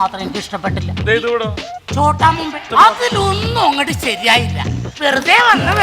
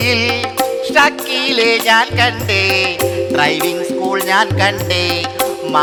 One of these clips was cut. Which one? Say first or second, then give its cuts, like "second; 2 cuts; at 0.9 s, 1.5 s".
first; 2 cuts; at 1.0 s, 2.6 s